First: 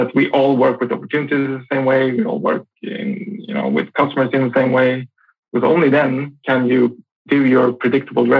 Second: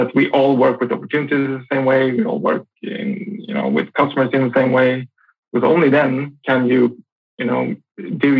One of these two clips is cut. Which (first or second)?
first